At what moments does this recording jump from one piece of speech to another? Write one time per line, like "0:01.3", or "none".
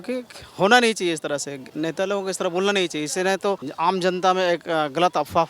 0:01.6
0:03.7